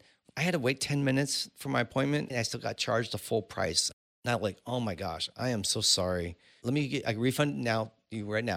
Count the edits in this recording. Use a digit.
3